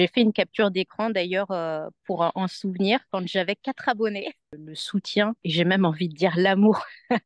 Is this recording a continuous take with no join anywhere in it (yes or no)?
no